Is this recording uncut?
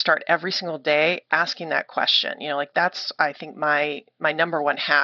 yes; 0 cuts

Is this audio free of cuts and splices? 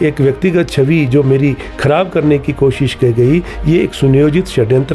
yes; 0 cuts

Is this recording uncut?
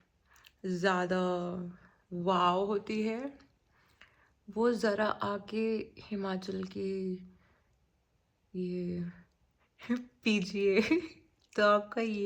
yes; 0 cuts

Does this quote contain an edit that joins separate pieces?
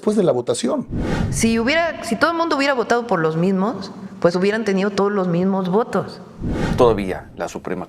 yes; 2 cuts; at 1.0 s, 6.6 s

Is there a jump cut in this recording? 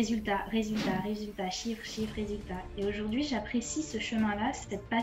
no; 0 cuts

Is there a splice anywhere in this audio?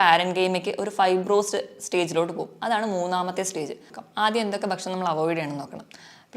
yes; 1 cut; at 3.9 s

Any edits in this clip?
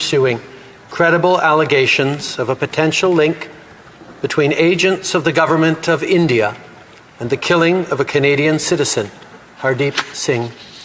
no; 0 cuts

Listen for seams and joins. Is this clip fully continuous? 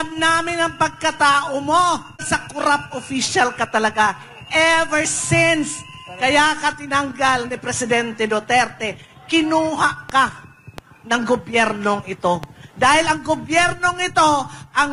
no; 1 cut; at 2.2 s

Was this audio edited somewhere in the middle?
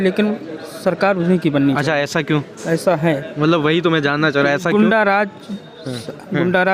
no; 0 cuts

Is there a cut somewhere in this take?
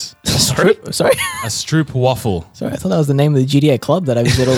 no; 0 cuts

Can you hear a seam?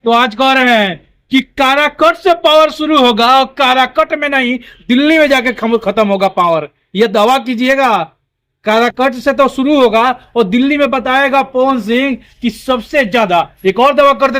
no; 0 cuts

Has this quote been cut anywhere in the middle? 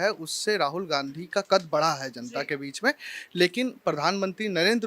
no; 0 cuts

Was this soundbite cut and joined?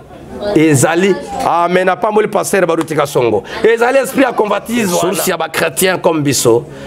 yes; 1 cut; at 5.1 s

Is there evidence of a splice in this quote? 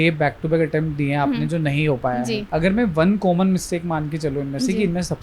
yes; 1 cut; at 2.4 s

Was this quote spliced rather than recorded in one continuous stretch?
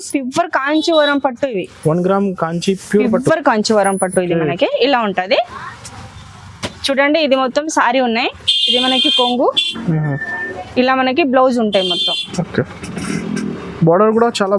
no; 0 cuts

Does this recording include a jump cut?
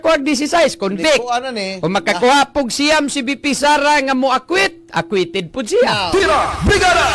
yes; 1 cut; at 6.1 s

